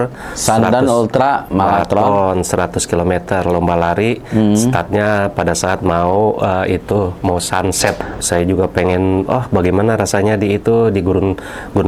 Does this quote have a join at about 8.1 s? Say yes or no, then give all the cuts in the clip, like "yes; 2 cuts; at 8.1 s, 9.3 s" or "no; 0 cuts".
yes; 1 cut; at 8.1 s